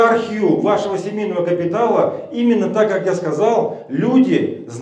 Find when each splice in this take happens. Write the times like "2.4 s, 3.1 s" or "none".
none